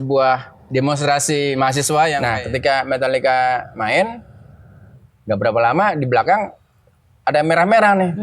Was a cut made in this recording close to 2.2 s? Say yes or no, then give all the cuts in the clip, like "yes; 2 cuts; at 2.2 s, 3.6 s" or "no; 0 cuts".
yes; 1 cut; at 2.2 s